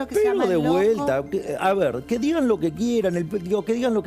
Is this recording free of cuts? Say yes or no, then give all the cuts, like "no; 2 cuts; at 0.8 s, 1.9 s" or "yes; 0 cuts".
yes; 0 cuts